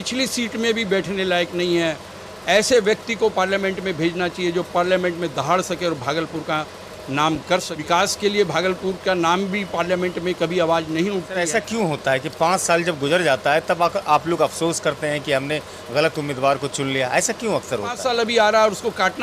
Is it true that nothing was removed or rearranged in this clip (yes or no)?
no